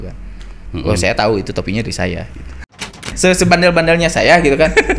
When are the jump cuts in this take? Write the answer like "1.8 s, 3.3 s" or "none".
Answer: 2.9 s